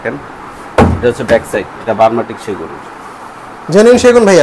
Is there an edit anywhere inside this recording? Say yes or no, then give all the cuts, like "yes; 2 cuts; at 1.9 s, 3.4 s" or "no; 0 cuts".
yes; 1 cut; at 1.8 s